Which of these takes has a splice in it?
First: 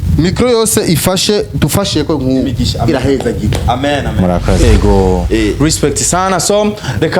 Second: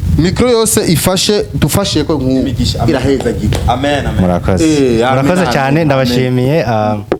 first; 1 cut; at 4.6 s

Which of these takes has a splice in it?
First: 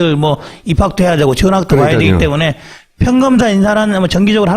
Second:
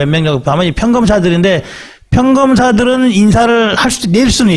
first; 1 cut; at 1.8 s

